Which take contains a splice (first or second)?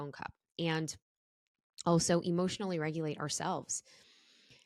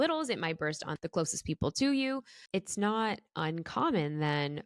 second